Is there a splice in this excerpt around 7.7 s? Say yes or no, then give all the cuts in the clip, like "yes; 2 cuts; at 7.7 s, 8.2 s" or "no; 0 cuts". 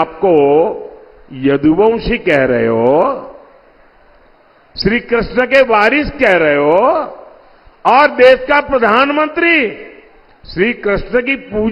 no; 0 cuts